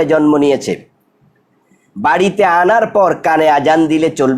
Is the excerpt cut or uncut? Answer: uncut